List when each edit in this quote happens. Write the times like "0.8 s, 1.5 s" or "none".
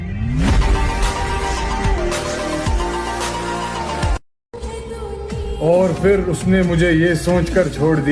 4.5 s